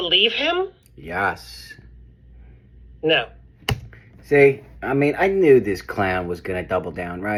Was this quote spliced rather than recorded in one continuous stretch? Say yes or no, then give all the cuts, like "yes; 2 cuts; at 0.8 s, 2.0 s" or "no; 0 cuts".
no; 0 cuts